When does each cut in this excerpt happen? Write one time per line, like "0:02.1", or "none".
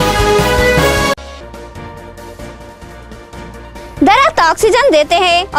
0:01.3

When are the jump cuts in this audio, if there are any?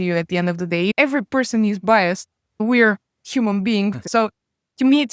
0:00.9
0:04.0

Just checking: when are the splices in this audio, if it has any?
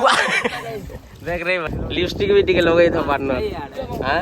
0:01.7

